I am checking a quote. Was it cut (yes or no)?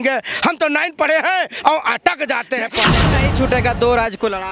yes